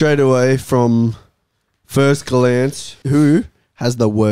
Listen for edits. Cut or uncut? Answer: cut